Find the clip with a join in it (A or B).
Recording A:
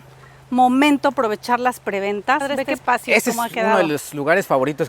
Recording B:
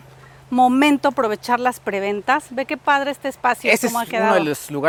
A